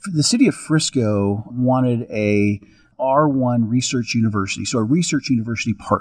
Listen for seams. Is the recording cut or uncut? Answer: cut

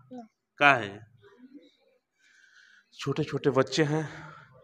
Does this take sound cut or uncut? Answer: uncut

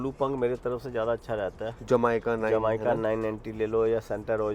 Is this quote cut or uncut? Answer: uncut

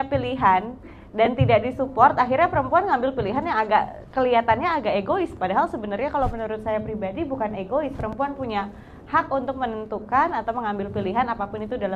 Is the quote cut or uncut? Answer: uncut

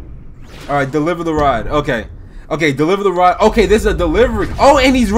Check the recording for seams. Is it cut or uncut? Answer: uncut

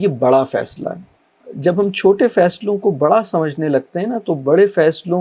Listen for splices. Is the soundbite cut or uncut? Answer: cut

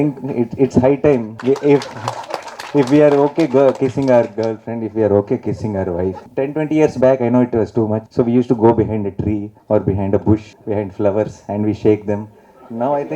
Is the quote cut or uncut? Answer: cut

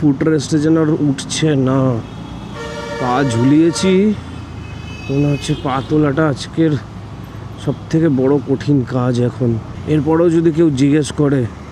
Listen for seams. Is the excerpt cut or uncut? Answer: uncut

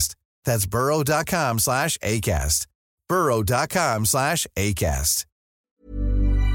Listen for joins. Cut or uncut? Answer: cut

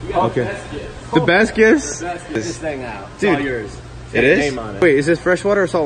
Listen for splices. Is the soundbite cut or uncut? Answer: cut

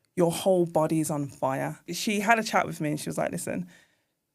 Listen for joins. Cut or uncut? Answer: cut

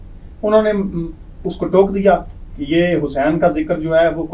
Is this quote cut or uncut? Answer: uncut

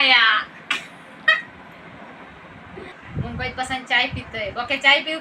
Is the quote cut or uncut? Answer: uncut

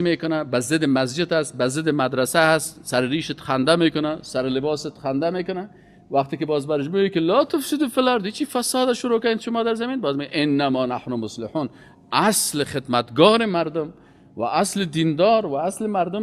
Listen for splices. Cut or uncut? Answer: uncut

